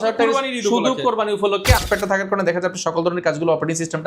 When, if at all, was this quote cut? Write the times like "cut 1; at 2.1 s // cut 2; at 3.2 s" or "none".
cut 1; at 1.8 s